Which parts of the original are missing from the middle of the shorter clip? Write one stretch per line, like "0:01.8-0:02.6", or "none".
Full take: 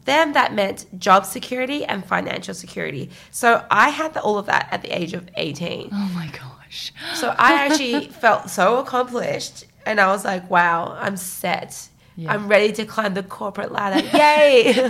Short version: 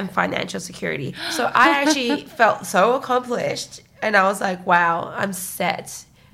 0:03.1-0:07.0